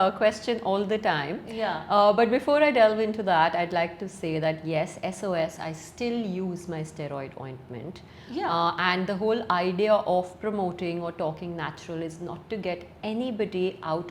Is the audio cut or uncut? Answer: uncut